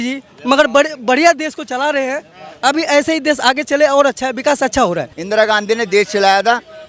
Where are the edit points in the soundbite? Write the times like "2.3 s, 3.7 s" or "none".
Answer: 5.1 s